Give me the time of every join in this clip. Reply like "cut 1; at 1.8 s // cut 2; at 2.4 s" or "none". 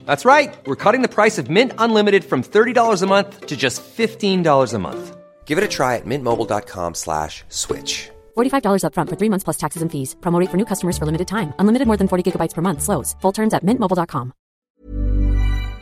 cut 1; at 14.6 s